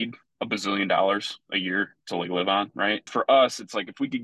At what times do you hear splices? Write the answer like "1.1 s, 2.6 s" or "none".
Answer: 3.1 s